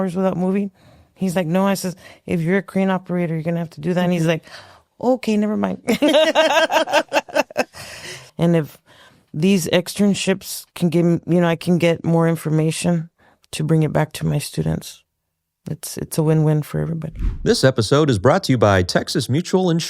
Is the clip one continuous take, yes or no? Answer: no